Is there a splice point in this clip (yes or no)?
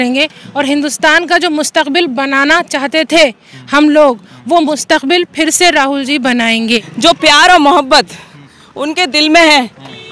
yes